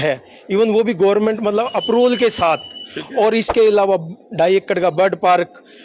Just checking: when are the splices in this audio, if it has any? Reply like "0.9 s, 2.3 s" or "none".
none